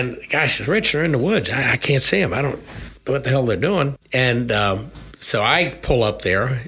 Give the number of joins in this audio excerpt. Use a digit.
1